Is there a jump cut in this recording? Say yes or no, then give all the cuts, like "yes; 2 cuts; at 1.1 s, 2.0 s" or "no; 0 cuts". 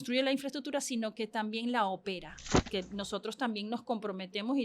yes; 1 cut; at 2.7 s